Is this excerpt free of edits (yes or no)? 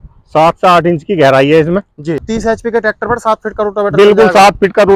no